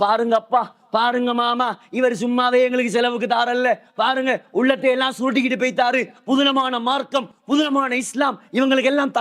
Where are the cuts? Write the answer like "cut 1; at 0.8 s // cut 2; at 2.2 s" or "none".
none